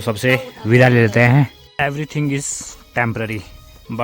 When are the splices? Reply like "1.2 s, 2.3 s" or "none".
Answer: 1.6 s